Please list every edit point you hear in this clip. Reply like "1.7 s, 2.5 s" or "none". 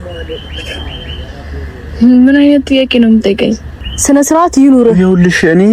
3.7 s